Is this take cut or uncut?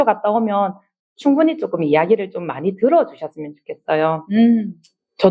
uncut